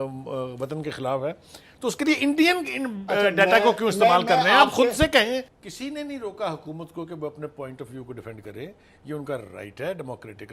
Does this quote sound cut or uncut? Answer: cut